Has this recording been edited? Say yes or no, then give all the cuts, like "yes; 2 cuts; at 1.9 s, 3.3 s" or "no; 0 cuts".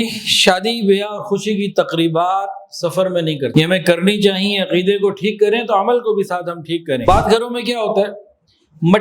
yes; 2 cuts; at 3.5 s, 7.0 s